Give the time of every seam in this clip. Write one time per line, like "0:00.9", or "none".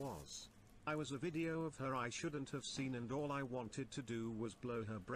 none